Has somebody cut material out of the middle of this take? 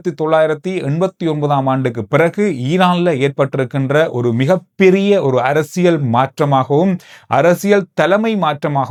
no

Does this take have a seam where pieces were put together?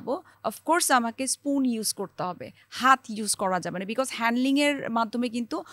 no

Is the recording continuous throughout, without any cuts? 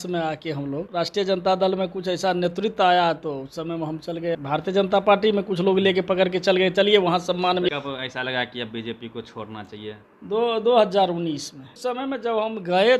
no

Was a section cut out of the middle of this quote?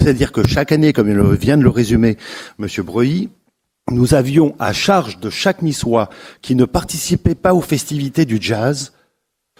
no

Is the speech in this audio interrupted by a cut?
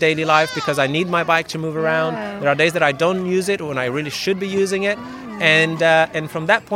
no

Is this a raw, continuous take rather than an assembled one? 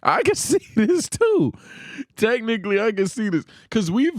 yes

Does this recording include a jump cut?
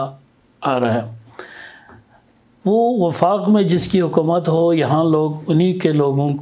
no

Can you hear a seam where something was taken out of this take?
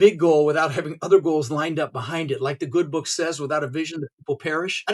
no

